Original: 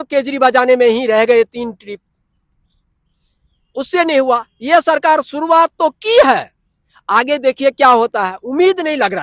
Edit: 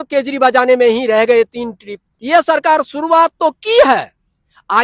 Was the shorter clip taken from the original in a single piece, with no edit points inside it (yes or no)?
no